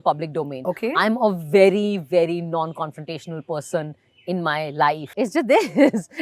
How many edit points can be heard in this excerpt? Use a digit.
1